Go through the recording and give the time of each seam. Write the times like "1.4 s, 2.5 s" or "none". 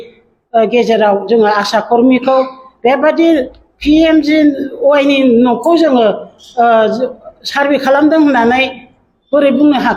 none